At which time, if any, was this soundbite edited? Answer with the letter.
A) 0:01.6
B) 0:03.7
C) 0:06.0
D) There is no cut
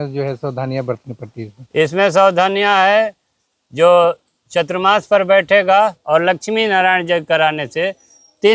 C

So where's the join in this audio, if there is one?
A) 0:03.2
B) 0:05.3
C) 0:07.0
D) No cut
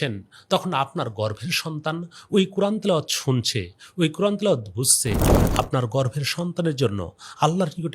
B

